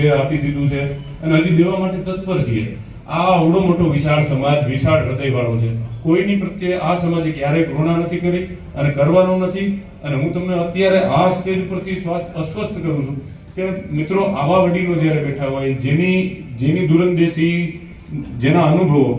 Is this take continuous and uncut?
yes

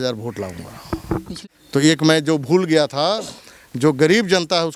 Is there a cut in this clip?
yes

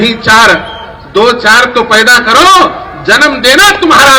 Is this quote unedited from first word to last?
yes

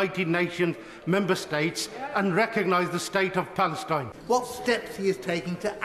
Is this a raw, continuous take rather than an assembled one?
no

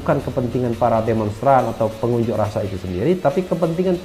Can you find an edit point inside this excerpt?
no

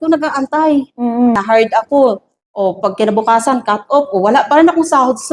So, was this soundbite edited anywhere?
yes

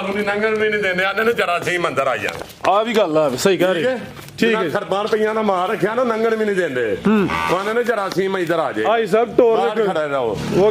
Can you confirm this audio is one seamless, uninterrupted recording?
yes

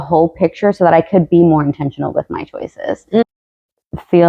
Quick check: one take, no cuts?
no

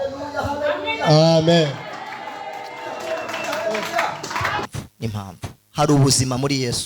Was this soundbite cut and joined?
yes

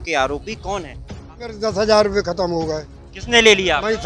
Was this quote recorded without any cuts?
no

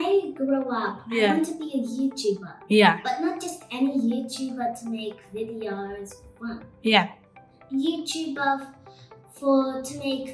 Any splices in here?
no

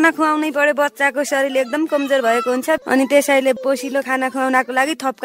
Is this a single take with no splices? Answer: no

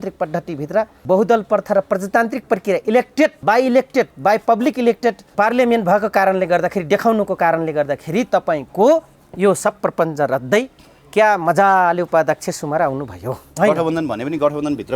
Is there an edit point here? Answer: yes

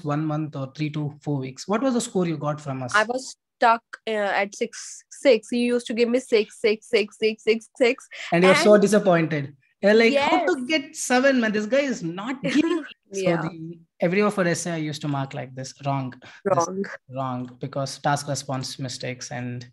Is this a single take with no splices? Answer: no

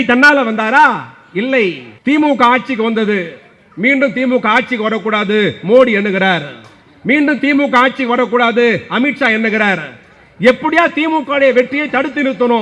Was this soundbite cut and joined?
yes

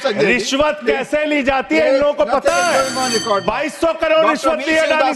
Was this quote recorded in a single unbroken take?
yes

